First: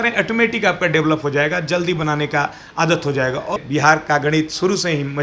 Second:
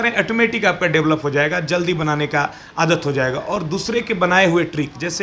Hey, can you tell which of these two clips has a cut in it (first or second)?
first